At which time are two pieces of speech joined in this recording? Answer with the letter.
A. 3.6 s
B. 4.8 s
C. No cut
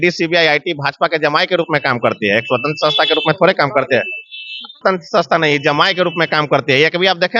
B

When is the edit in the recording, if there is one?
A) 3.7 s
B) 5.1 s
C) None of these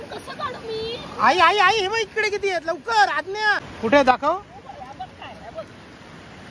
A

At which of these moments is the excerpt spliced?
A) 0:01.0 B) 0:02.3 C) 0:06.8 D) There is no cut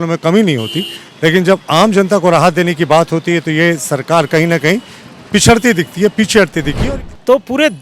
C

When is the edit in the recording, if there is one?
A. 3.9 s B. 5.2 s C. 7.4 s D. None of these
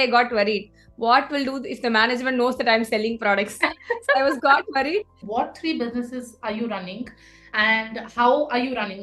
B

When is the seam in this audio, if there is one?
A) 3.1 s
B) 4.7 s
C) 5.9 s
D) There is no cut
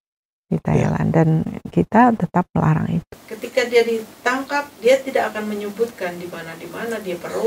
A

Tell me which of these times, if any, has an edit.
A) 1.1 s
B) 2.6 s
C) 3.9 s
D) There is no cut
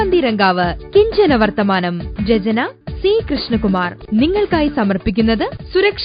C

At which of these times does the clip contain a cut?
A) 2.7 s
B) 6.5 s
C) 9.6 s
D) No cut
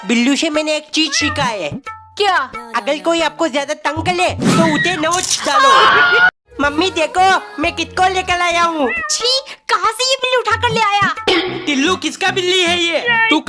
B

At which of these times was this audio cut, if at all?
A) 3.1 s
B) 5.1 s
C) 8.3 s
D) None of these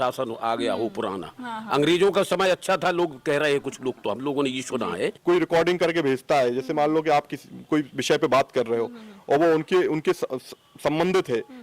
B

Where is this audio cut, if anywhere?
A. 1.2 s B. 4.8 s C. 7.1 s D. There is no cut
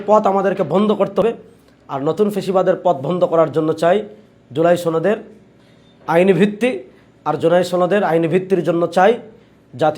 A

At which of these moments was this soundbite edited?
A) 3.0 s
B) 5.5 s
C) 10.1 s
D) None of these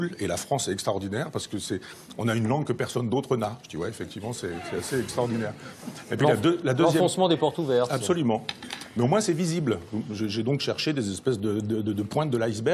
B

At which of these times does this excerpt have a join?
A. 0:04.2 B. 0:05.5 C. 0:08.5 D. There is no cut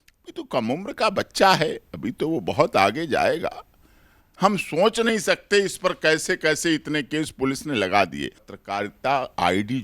A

